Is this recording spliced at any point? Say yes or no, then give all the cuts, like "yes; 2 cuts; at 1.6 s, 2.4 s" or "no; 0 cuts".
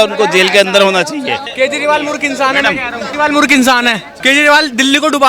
yes; 3 cuts; at 1.4 s, 3.1 s, 4.1 s